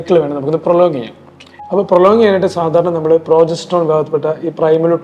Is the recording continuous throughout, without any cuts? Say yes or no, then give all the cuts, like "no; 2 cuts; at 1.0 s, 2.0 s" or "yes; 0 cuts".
yes; 0 cuts